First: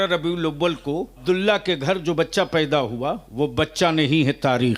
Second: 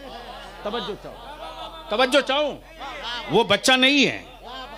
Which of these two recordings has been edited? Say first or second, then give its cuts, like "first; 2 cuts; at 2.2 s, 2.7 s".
first; 2 cuts; at 1.2 s, 3.2 s